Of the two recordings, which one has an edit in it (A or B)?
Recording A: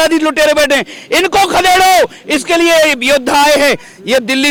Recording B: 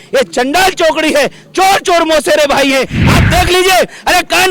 B